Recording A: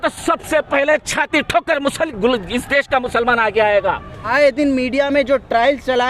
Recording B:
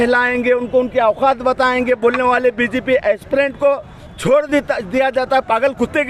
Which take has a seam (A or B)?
A